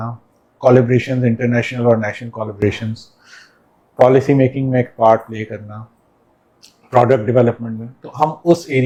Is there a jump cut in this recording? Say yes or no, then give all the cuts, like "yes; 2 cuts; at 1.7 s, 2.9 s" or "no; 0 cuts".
no; 0 cuts